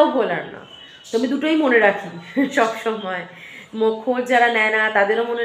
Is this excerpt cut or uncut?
uncut